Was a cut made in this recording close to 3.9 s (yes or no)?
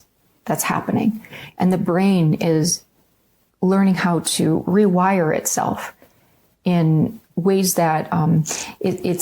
no